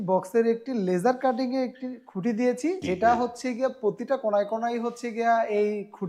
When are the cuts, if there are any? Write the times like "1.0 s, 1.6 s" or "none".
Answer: 2.8 s